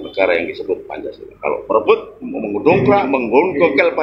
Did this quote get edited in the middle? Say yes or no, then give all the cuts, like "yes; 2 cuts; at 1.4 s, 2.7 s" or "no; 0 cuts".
no; 0 cuts